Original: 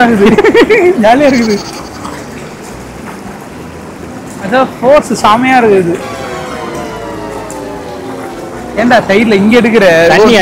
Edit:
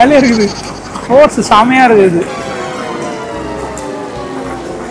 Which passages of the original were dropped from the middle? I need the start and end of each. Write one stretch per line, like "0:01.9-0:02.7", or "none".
0:02.1-0:04.7

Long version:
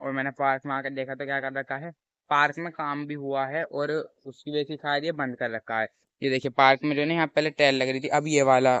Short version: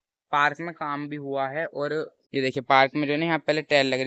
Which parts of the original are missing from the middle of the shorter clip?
0:04.2-0:06.1

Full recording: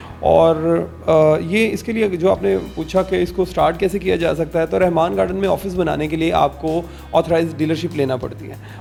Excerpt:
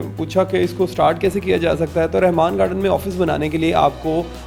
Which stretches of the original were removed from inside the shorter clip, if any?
none

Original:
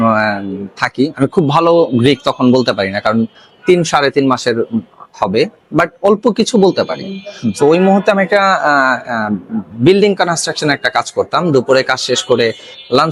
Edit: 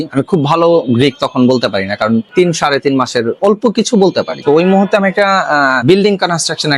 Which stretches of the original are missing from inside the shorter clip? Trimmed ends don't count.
0:03.3-0:03.6
0:04.7-0:06.0
0:07.0-0:07.5
0:08.9-0:09.8

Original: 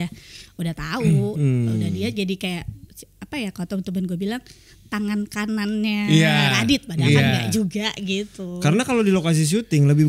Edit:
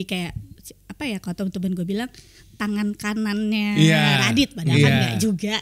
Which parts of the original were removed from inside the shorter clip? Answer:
none

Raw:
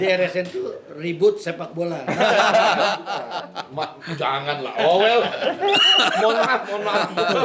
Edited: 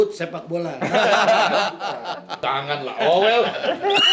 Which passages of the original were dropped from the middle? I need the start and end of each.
0:03.6-0:04.1

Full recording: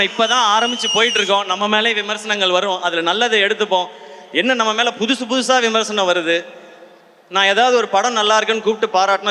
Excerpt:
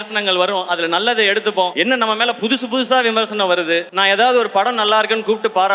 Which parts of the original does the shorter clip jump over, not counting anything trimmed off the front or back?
0:03.9-0:04.3
0:06.5-0:07.3

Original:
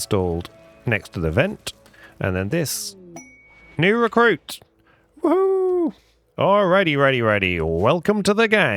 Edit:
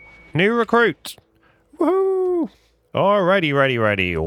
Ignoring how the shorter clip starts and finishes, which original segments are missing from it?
none

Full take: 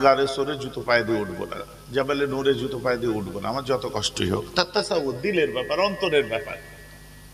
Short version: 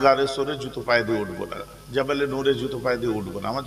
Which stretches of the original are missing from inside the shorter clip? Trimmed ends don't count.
none

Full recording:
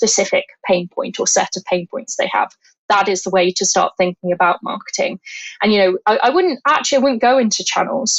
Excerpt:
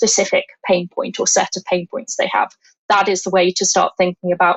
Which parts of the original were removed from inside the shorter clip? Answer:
none

